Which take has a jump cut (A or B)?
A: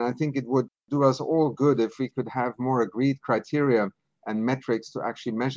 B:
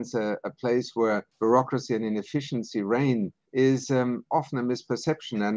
B